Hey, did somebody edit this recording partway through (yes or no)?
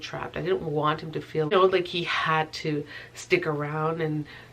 yes